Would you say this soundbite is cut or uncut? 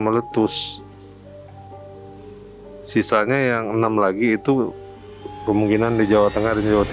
uncut